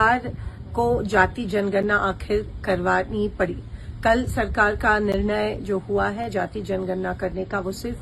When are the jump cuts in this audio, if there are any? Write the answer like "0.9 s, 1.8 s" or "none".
none